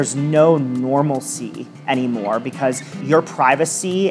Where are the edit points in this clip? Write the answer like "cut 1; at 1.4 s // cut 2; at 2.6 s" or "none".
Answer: cut 1; at 2.9 s